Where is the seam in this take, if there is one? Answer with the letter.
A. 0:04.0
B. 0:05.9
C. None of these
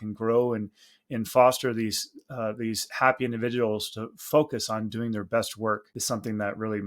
B